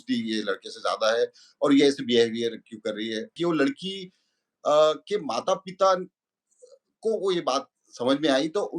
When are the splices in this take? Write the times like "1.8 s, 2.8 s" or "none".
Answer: 3.4 s